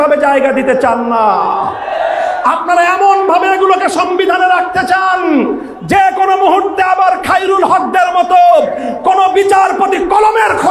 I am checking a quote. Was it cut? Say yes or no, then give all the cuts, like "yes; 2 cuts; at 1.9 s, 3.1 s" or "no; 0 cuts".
no; 0 cuts